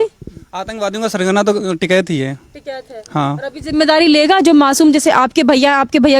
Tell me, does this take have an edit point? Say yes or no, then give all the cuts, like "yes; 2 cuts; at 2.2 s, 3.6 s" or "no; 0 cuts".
no; 0 cuts